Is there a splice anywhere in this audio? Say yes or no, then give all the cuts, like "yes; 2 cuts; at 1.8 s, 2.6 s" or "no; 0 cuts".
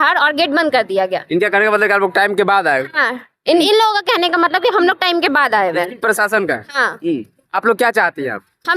no; 0 cuts